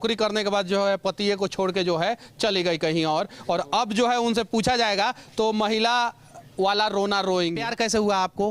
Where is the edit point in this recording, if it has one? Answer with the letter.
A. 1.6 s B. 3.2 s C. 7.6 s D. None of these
C